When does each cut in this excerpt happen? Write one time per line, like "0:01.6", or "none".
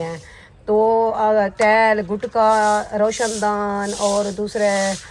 none